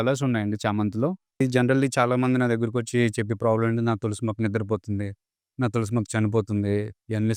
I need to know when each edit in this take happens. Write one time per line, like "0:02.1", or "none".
0:01.4